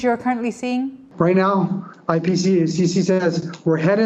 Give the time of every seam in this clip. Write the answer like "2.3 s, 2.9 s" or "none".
1.0 s